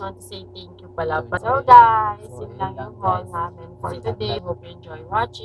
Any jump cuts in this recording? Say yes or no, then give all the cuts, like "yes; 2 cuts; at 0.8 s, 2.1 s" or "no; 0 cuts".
yes; 2 cuts; at 1.4 s, 4.4 s